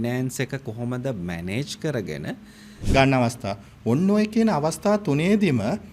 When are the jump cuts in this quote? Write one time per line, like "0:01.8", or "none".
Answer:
0:02.7